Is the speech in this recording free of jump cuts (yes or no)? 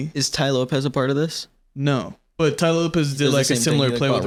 yes